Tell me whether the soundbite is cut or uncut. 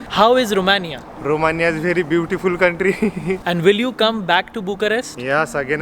cut